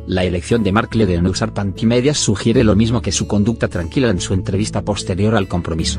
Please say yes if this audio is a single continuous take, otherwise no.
yes